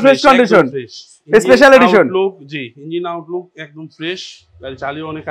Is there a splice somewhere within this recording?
no; 0 cuts

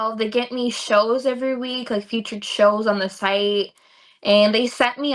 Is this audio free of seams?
yes; 0 cuts

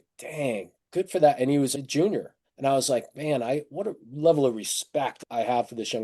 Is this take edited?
yes; 1 cut; at 1.7 s

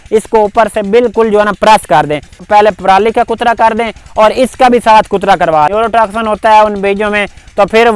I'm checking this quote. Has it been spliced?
yes; 2 cuts; at 2.5 s, 5.7 s

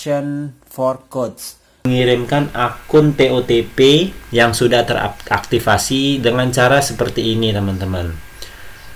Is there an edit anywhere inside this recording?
yes; 1 cut; at 1.9 s

